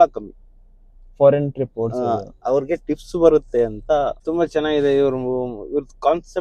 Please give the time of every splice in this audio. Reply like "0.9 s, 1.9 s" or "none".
4.2 s